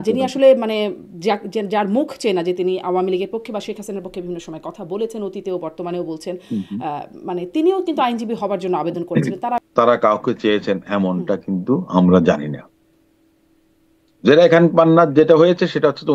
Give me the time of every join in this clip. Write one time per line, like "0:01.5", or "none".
0:09.6